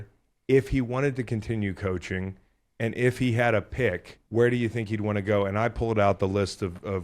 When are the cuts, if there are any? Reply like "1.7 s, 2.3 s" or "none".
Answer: 4.1 s

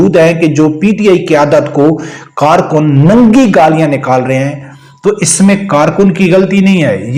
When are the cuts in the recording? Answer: none

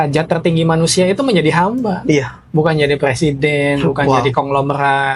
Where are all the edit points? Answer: none

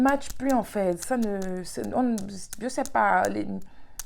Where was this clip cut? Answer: none

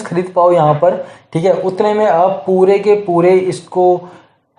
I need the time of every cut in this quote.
none

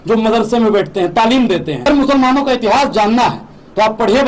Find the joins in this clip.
1.9 s

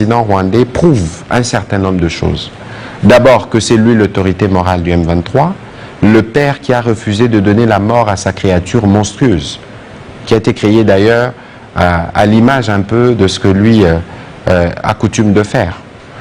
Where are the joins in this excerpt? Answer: none

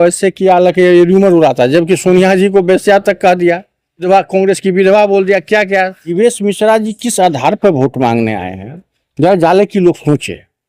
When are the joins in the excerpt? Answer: 4.1 s, 6.1 s

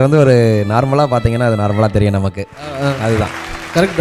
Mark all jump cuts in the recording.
none

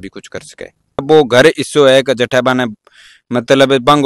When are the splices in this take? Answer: 1.0 s

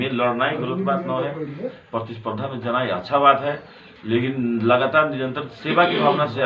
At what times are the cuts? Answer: none

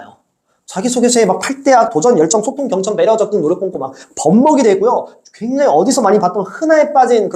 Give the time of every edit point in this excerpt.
none

